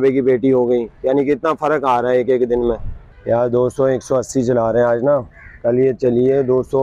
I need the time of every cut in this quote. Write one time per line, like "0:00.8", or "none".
none

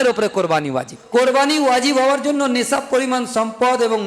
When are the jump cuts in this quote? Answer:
0:00.9

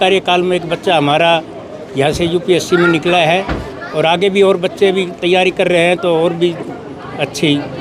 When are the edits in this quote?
none

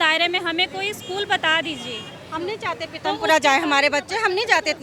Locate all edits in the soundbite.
none

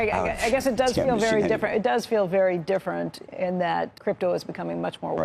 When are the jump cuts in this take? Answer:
0:03.9

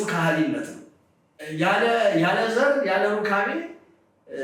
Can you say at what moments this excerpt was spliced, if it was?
0:01.4

